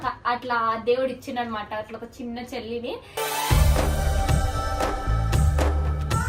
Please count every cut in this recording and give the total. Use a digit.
0